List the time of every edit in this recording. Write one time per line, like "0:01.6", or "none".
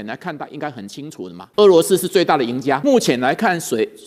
0:01.4
0:02.8

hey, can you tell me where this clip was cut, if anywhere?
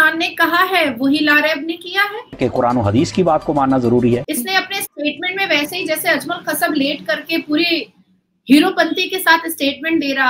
0:02.4
0:04.3

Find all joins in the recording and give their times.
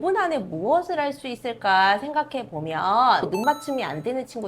0:03.3

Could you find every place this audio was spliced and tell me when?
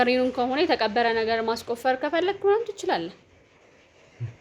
none

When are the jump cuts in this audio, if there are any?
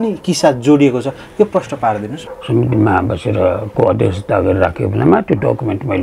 0:02.2

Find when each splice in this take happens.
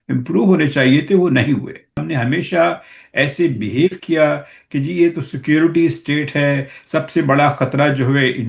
0:02.0

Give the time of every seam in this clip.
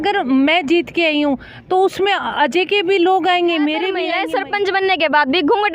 0:04.0

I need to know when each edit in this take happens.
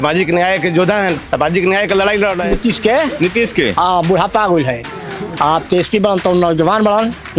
0:02.5

